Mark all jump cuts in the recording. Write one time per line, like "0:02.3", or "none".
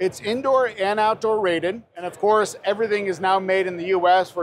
0:01.9